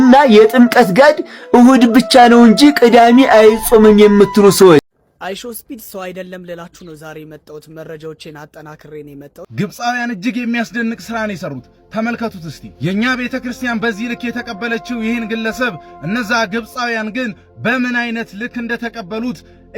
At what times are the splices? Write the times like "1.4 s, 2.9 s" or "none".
4.9 s, 9.5 s